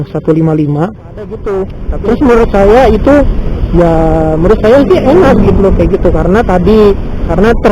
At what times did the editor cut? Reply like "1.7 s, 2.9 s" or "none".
1.4 s